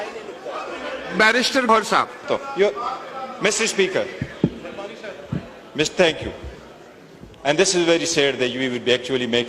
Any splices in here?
yes; 1 cut; at 1.7 s

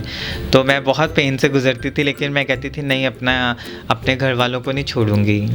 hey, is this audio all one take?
yes; 0 cuts

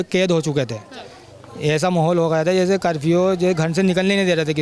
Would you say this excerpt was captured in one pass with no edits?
yes; 0 cuts

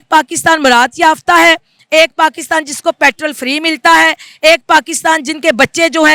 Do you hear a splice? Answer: no; 0 cuts

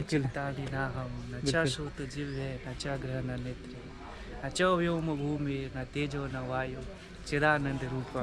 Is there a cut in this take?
no; 0 cuts

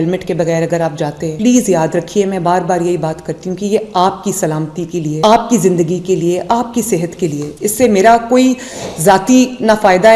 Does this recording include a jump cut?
no; 0 cuts

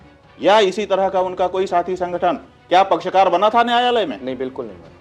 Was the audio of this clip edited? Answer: no; 0 cuts

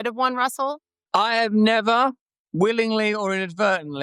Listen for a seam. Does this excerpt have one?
yes; 1 cut; at 0.9 s

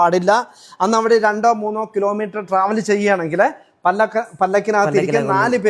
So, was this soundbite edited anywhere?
no; 0 cuts

